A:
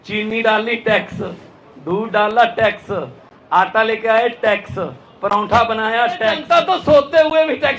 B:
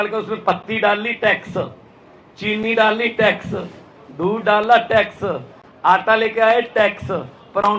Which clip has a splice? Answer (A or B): A